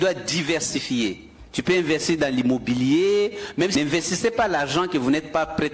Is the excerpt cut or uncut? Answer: cut